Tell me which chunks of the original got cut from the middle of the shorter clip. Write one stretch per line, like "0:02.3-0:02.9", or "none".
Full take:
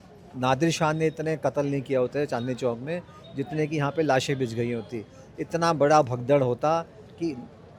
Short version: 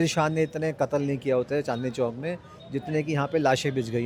none

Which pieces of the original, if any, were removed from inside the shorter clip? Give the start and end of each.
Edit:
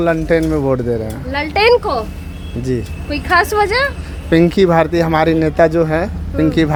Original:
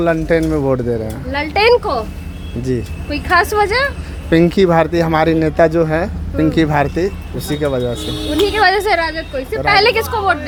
none

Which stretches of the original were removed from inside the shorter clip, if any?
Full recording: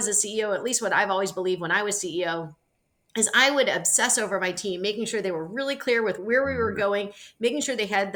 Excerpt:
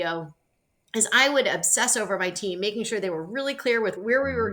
none

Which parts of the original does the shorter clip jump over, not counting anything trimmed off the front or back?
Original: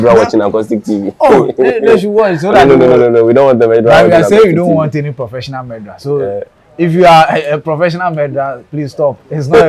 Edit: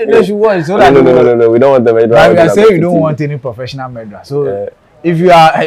none

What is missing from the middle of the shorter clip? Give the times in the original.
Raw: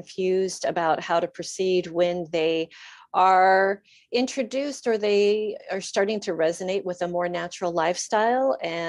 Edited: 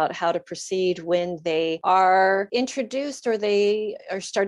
0:02.7-0:03.1
0:03.8-0:04.1

